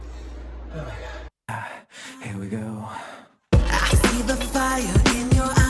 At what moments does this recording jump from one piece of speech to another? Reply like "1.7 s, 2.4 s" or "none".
1.3 s